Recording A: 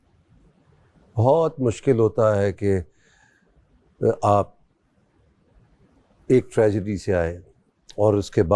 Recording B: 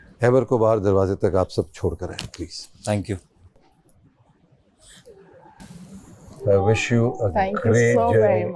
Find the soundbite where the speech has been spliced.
B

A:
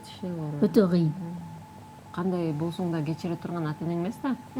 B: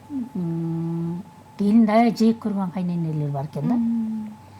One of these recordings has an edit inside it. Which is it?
A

